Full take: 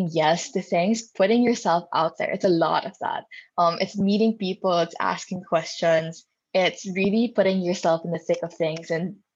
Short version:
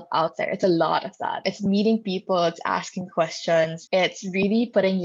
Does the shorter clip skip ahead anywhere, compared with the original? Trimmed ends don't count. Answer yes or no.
yes